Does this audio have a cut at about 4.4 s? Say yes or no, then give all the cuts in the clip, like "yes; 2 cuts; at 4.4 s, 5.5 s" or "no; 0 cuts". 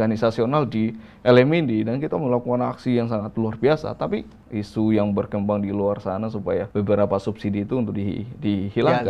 yes; 2 cuts; at 4.4 s, 6.7 s